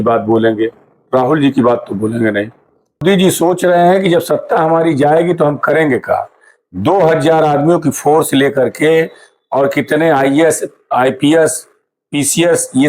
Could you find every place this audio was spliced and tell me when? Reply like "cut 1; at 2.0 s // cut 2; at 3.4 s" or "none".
cut 1; at 3.0 s

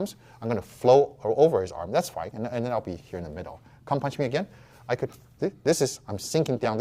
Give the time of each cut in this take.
none

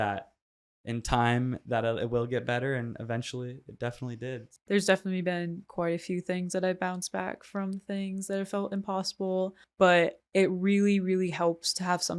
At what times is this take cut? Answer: cut 1; at 4.5 s // cut 2; at 9.6 s // cut 3; at 10.2 s

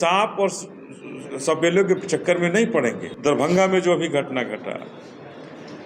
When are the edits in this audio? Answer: cut 1; at 3.1 s

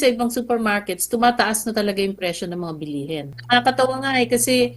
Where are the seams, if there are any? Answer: cut 1; at 3.4 s

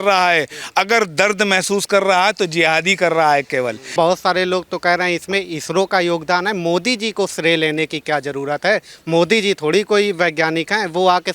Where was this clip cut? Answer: cut 1; at 3.9 s

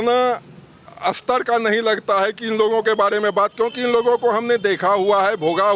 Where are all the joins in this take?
none

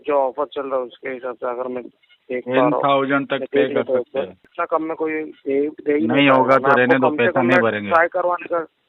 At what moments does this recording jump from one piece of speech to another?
cut 1; at 4.5 s

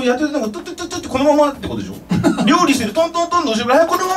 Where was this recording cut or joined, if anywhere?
none

